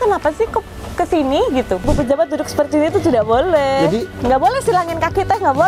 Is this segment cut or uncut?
cut